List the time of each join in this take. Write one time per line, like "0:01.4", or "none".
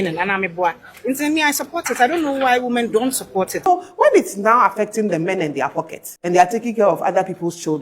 0:03.6
0:06.0